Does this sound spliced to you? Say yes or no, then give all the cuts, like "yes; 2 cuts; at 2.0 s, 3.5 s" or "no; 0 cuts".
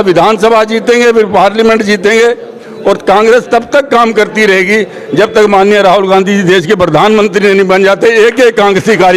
no; 0 cuts